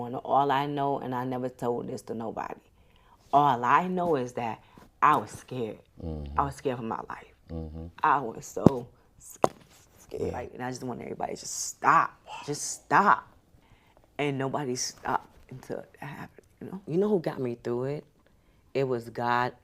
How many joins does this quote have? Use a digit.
2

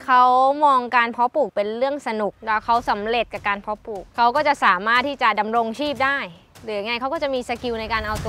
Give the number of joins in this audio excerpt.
2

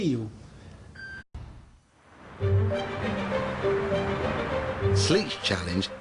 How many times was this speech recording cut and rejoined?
0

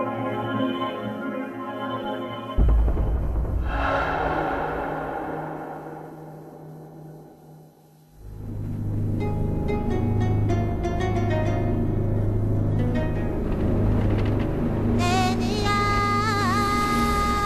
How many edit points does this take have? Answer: 0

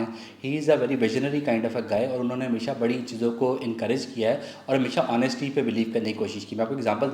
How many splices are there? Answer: 0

